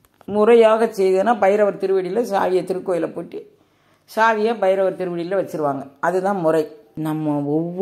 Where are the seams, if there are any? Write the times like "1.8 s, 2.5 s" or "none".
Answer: 6.8 s